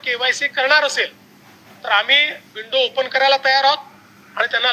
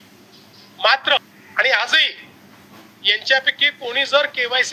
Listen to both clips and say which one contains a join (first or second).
second